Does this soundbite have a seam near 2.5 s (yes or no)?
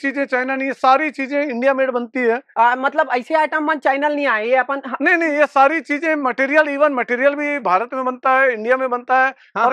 no